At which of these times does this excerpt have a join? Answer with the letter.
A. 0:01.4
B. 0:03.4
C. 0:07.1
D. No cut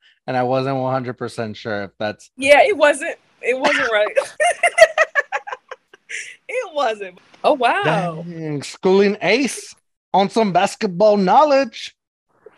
C